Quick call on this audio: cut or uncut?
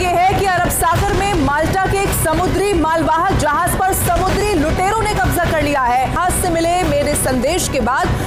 uncut